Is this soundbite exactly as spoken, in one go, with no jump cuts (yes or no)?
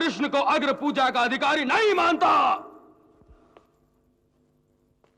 yes